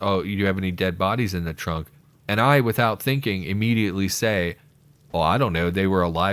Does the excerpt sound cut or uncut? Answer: uncut